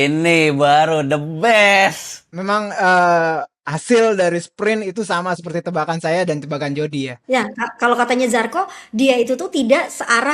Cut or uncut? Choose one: cut